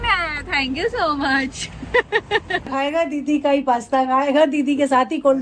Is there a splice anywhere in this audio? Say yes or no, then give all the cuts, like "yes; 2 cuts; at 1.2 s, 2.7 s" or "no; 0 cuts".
yes; 1 cut; at 2.7 s